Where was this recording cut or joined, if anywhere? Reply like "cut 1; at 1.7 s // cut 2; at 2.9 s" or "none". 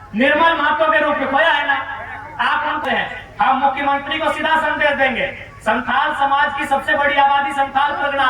cut 1; at 2.8 s